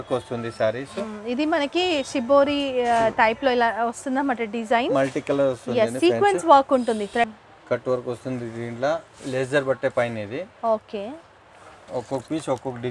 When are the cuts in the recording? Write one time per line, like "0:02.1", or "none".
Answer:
0:07.3
0:11.7